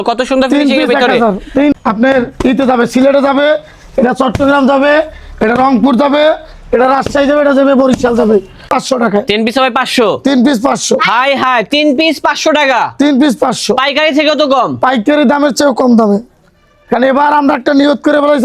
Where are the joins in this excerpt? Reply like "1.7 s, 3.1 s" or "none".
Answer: 1.7 s, 8.7 s